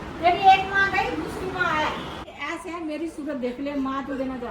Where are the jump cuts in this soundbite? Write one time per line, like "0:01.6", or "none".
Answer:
0:02.2